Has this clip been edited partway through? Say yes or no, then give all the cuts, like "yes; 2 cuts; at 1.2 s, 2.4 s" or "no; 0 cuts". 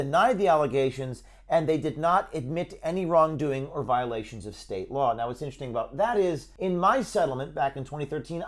no; 0 cuts